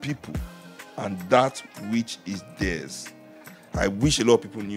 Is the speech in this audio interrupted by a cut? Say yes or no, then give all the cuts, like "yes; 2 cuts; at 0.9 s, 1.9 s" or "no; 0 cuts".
no; 0 cuts